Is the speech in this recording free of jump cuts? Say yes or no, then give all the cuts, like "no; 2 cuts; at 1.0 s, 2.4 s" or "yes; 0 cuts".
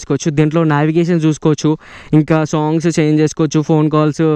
yes; 0 cuts